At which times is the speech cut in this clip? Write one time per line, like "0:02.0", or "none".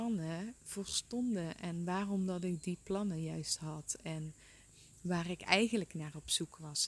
0:04.6